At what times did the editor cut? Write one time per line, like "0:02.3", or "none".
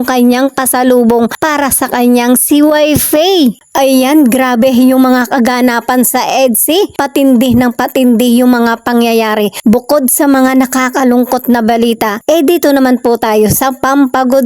0:03.6